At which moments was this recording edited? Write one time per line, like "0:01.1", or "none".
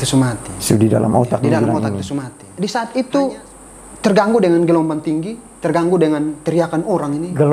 0:02.4